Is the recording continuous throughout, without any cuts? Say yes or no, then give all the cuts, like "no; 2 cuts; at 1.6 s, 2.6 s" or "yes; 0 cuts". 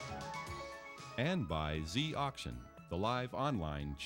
no; 1 cut; at 1.0 s